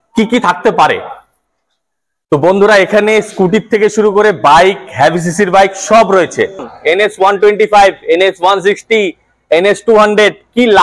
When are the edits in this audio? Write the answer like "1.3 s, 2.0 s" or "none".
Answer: 6.7 s